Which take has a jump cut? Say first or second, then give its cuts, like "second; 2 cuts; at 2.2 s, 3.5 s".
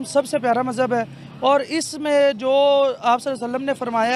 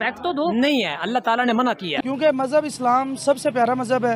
second; 1 cut; at 1.9 s